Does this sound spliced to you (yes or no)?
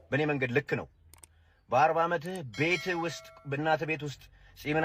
no